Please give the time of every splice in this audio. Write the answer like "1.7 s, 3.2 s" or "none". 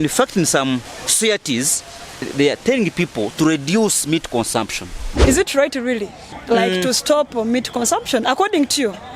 1.0 s, 2.2 s, 5.2 s